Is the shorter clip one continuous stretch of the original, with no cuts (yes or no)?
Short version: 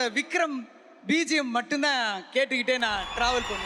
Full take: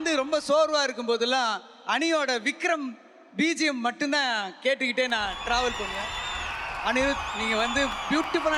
yes